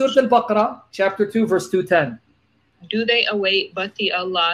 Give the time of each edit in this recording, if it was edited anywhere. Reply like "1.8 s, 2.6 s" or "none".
2.8 s